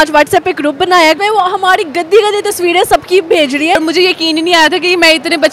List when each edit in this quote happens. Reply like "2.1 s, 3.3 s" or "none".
1.2 s, 3.8 s